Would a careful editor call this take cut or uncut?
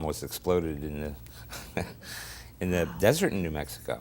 cut